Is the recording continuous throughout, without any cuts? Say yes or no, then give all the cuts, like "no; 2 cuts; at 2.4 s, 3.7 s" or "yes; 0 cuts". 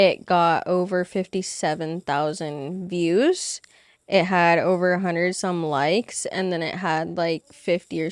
yes; 0 cuts